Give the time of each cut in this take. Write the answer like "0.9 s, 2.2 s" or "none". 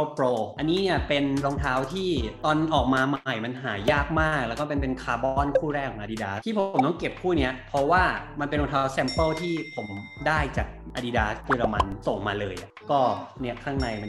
none